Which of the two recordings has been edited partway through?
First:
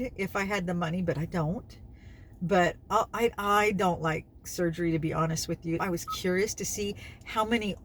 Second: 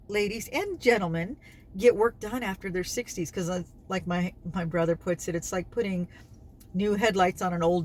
first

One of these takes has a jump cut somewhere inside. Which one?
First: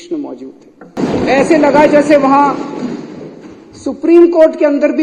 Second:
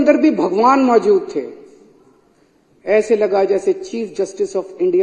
first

